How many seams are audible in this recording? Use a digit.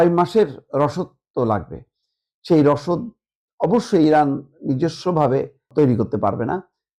0